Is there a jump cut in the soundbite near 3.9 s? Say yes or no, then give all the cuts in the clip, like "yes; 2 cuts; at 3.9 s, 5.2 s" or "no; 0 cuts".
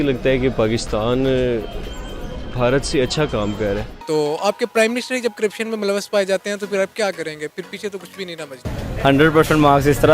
yes; 2 cuts; at 3.9 s, 8.8 s